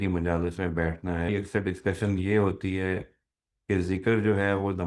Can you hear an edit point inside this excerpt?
yes; 1 cut; at 1.3 s

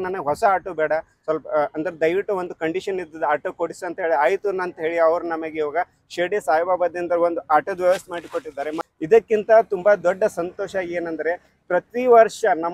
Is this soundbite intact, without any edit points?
no; 1 cut; at 8.8 s

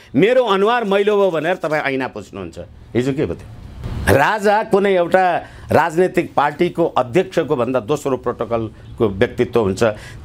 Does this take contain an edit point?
no; 0 cuts

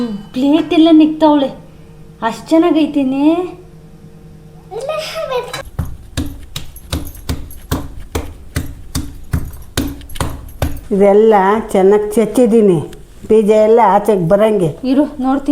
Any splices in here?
yes; 1 cut; at 5.6 s

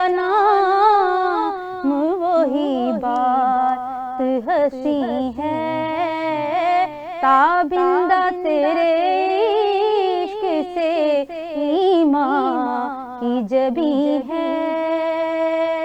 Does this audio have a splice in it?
no; 0 cuts

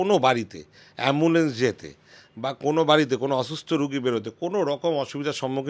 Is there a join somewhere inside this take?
no; 0 cuts

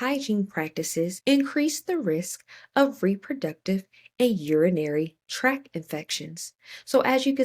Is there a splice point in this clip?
yes; 1 cut; at 1.2 s

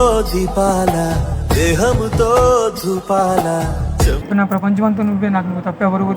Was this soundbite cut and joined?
yes; 1 cut; at 4.2 s

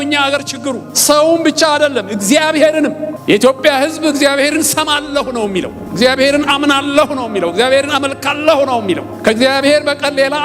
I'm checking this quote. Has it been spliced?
yes; 4 cuts; at 0.9 s, 3.1 s, 5.8 s, 9.1 s

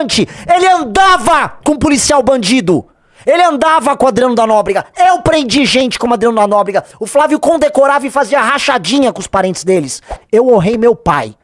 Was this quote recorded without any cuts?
no; 1 cut; at 10.0 s

